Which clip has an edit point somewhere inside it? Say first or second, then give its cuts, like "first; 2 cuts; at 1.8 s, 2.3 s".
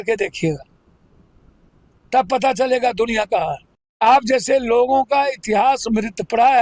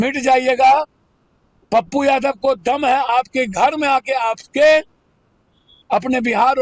first; 1 cut; at 4.0 s